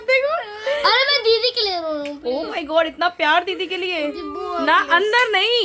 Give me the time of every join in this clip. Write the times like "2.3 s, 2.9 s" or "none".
none